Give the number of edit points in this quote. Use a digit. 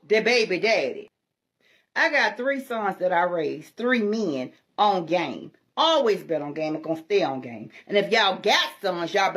1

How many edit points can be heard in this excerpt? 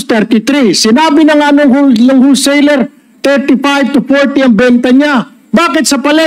0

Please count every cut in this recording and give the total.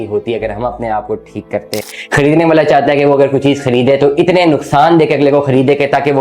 1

